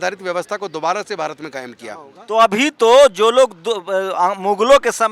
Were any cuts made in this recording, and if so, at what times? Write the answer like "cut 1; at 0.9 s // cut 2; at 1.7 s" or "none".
cut 1; at 2.2 s